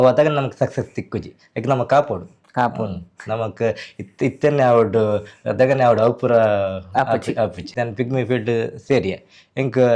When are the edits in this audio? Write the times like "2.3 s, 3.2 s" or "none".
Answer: 7.7 s